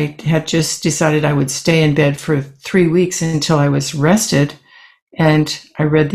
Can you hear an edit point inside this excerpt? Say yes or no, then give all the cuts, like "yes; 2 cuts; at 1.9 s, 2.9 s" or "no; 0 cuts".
no; 0 cuts